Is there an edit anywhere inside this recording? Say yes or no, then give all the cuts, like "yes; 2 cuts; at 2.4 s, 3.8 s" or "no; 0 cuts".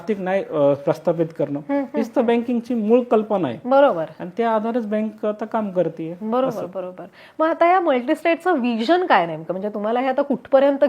no; 0 cuts